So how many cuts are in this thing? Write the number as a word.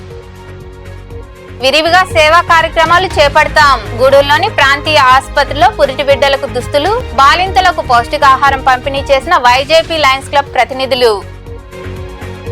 one